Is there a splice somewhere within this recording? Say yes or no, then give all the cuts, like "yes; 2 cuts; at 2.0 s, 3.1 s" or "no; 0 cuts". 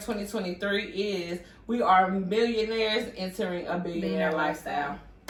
no; 0 cuts